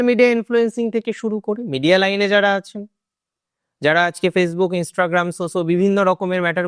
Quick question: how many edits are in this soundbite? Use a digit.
0